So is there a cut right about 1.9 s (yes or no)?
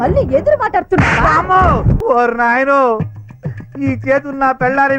yes